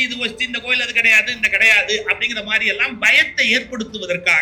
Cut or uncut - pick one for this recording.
uncut